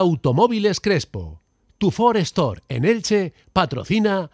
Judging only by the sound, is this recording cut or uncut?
uncut